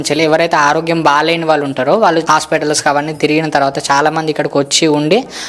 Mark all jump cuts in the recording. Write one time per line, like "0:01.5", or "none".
0:02.2